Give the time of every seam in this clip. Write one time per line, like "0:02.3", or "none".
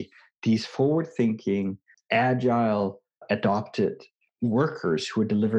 0:01.9
0:03.2
0:04.2

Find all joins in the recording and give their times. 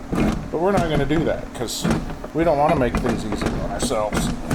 0:02.2

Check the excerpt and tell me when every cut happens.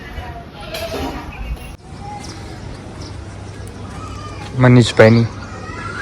0:01.8

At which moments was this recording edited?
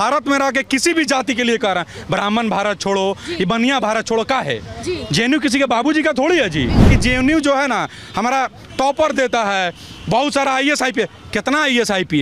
0:06.9

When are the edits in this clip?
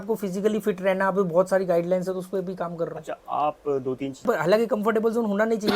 0:04.2

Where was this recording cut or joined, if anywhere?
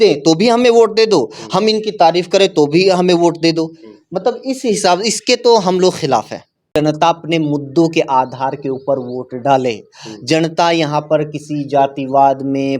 0:06.8

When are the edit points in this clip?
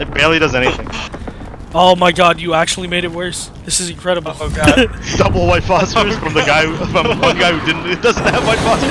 none

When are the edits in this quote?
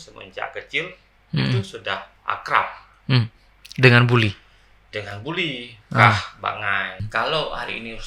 0:02.1
0:07.0

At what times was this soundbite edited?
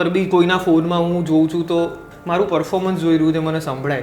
0:02.1

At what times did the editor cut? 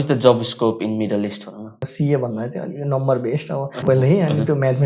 0:01.8
0:03.8

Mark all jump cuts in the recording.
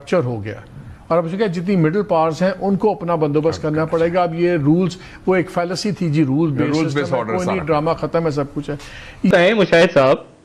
0:09.3

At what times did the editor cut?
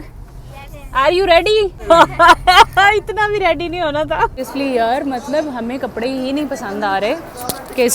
0:01.8
0:04.3

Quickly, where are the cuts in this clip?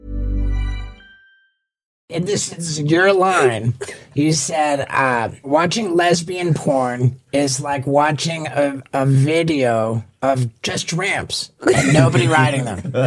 0:02.0

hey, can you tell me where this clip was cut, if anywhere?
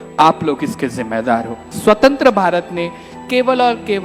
0:01.7

